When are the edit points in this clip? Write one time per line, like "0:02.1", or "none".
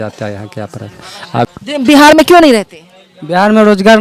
0:01.5